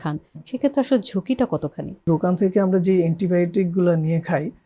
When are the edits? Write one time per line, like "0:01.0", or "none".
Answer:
0:02.1